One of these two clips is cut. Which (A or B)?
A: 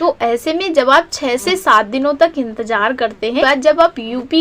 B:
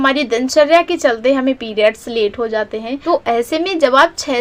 A